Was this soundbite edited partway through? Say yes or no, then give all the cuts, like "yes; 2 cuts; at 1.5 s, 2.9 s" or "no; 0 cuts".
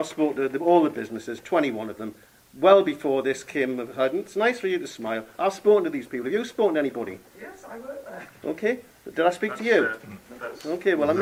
no; 0 cuts